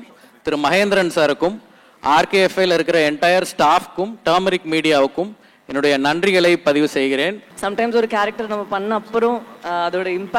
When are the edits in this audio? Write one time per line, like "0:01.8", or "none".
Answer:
0:07.5